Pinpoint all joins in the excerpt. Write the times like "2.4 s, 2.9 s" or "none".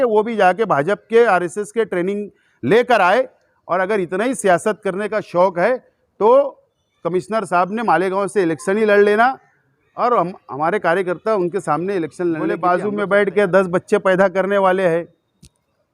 12.6 s